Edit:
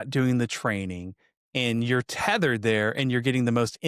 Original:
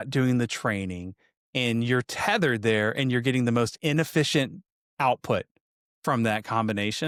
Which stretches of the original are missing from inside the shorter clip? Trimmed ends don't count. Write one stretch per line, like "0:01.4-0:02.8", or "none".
none